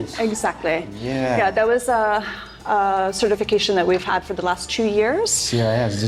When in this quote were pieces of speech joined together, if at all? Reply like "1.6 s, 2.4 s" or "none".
none